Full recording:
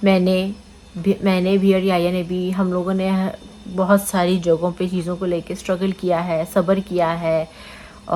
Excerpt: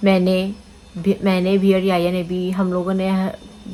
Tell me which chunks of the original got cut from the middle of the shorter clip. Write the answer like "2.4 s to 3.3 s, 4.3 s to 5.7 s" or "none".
none